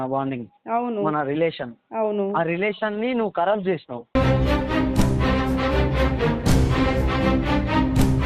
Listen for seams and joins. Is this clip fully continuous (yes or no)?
yes